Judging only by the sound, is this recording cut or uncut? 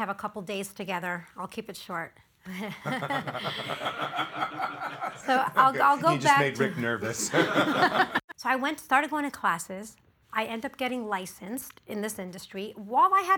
cut